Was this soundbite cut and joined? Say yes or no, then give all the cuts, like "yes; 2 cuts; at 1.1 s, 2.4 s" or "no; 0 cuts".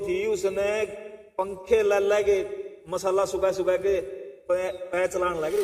no; 0 cuts